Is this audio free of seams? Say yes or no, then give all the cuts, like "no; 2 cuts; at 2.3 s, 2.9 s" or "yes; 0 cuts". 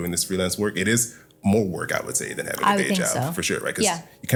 yes; 0 cuts